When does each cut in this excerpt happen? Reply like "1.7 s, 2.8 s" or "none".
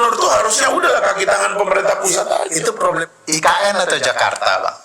3.0 s